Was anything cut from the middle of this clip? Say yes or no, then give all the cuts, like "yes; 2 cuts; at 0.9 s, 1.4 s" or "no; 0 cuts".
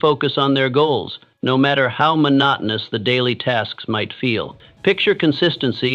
yes; 1 cut; at 4.6 s